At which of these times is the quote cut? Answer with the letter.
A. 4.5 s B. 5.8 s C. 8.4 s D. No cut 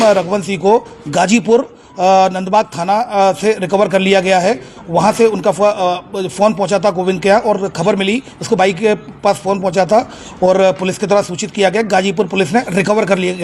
D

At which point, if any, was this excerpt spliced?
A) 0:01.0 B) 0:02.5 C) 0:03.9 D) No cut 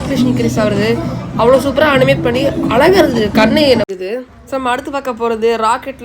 C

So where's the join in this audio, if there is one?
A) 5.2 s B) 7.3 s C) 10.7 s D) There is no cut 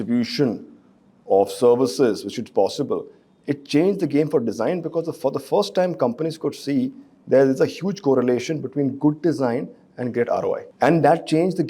C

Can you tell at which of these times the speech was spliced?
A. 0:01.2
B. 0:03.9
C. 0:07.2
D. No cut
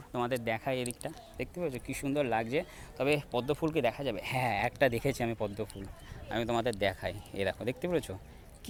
D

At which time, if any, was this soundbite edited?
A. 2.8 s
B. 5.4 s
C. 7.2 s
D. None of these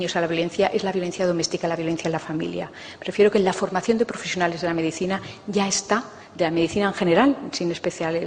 B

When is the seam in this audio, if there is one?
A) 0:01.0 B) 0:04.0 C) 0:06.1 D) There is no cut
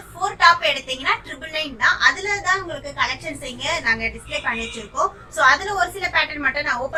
D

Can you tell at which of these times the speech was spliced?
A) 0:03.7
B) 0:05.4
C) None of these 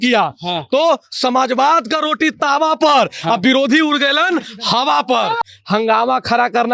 B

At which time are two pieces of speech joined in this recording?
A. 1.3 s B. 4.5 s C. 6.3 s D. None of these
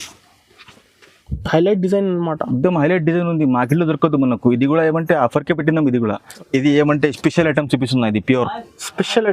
C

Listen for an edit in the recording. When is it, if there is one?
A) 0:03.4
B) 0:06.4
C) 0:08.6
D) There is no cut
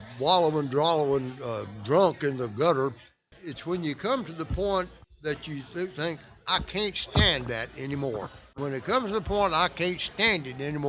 C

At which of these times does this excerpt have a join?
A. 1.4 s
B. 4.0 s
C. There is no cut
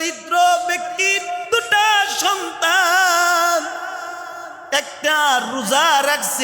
A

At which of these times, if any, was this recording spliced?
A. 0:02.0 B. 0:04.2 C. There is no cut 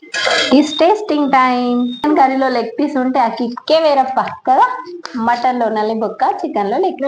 A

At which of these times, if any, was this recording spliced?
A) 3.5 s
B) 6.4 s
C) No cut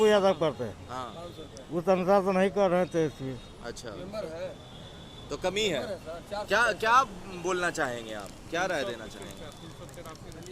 C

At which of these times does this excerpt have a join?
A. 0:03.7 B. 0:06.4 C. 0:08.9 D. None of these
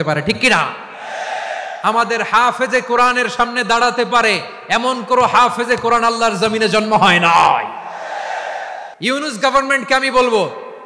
C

